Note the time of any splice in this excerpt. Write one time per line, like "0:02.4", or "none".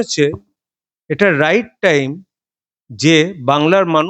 none